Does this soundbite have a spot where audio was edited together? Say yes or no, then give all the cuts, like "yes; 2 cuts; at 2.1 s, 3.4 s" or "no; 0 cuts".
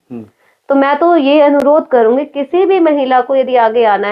no; 0 cuts